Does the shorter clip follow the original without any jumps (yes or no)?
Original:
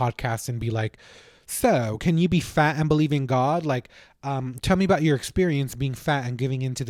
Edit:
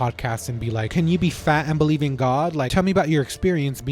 no